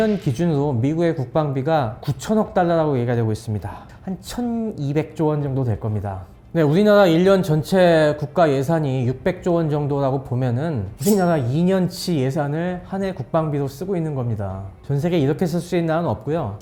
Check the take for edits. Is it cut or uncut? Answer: uncut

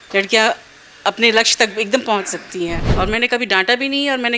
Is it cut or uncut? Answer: cut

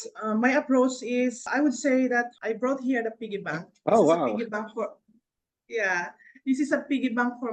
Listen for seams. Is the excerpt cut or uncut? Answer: cut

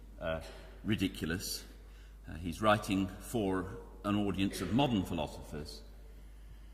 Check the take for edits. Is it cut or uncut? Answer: cut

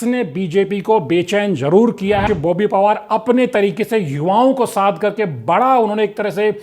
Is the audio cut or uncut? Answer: cut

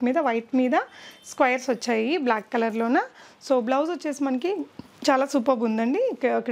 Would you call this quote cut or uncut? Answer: uncut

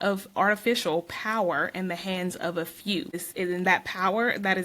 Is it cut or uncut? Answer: cut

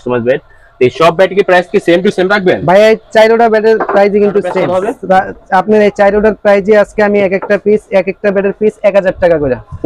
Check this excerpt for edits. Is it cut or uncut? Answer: cut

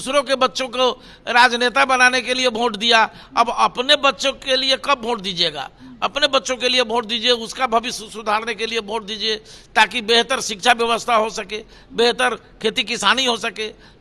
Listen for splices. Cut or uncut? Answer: uncut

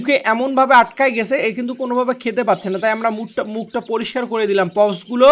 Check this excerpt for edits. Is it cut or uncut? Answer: uncut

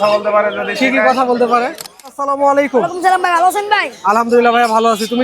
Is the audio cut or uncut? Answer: cut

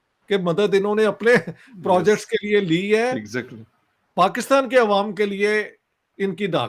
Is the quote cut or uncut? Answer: uncut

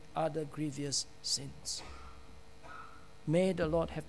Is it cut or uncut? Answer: uncut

